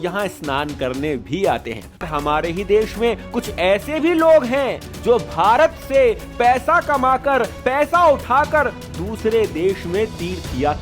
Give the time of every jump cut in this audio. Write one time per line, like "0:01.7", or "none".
0:02.1